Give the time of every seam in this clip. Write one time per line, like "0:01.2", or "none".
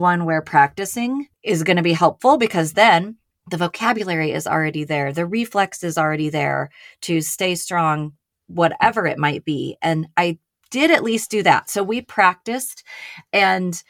0:01.3